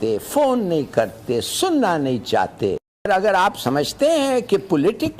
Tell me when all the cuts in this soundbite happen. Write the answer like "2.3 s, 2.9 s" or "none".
3.1 s